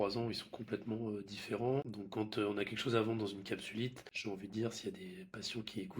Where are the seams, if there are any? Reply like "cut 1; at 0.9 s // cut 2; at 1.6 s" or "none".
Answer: cut 1; at 2.0 s // cut 2; at 4.1 s